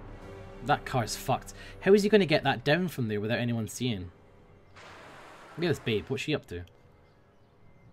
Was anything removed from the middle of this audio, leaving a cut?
yes; 1 cut; at 4.7 s

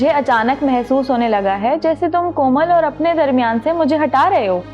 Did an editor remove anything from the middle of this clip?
no; 0 cuts

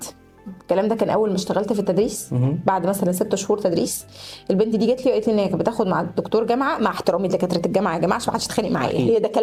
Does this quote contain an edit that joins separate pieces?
no; 0 cuts

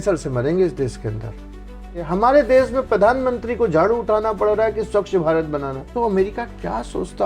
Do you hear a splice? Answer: yes; 2 cuts; at 2.0 s, 5.9 s

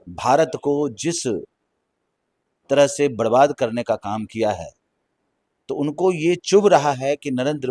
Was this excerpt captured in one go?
yes; 0 cuts

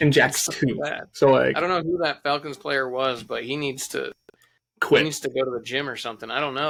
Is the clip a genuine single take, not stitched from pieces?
yes; 0 cuts

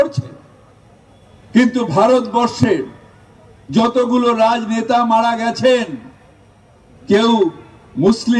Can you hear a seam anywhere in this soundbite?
no; 0 cuts

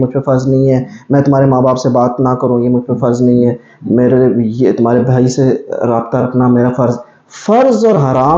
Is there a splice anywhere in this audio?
no; 0 cuts

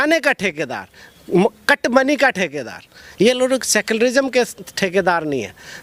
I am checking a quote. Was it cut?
no; 0 cuts

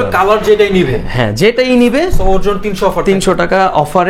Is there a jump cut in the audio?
no; 0 cuts

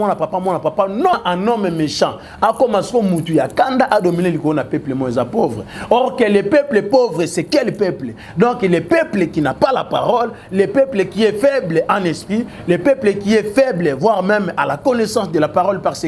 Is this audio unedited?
no; 1 cut; at 1.1 s

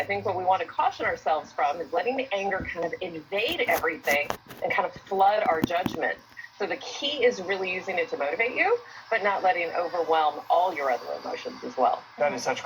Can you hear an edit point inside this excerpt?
no; 0 cuts

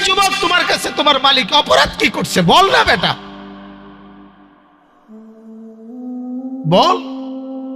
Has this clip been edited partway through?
yes; 4 cuts; at 3.2 s, 4.9 s, 6.5 s, 7.0 s

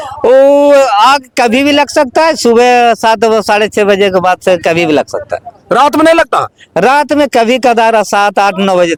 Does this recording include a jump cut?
no; 0 cuts

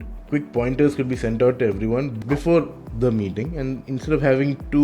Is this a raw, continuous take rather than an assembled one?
no; 1 cut; at 2.1 s

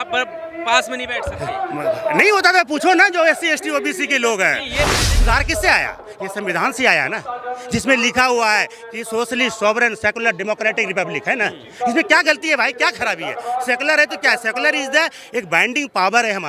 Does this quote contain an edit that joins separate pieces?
yes; 1 cut; at 5.1 s

